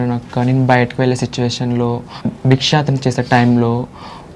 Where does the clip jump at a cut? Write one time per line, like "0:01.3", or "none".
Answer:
0:02.2